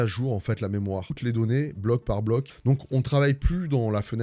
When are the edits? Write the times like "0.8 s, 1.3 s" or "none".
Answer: 1.1 s, 2.5 s

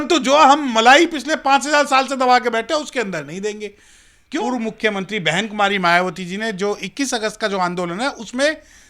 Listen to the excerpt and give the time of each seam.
4.4 s

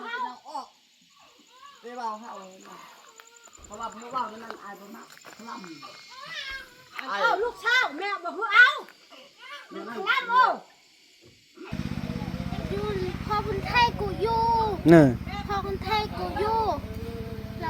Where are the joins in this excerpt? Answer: 11.7 s

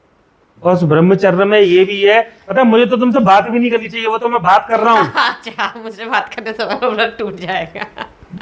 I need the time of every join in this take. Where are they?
2.4 s

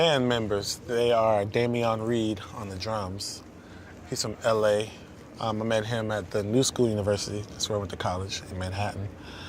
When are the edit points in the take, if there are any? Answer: 3.1 s

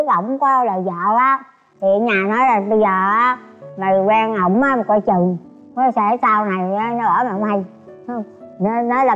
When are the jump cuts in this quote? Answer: none

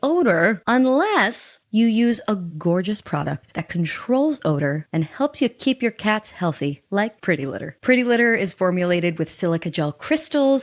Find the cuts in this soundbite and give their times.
2.5 s

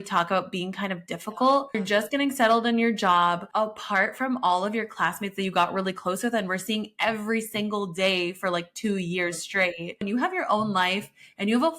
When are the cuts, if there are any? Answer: 1.8 s, 3.4 s, 10.0 s

